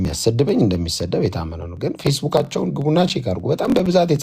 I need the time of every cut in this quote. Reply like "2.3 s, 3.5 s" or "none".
none